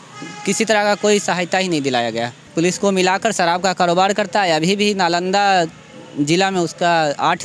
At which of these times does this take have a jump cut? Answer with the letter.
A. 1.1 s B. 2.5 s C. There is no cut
B